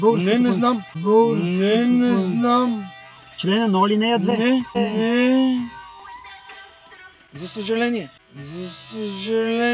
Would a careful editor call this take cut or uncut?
uncut